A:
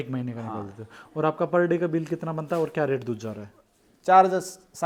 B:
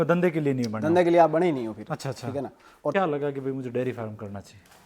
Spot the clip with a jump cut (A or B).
B